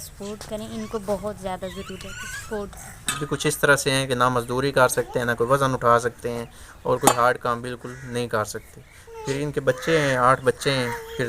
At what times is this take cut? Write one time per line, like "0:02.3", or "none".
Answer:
0:03.2